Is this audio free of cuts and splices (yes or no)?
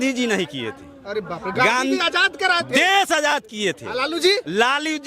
yes